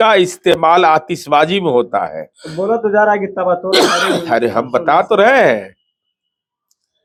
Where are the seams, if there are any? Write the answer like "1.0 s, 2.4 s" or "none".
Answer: none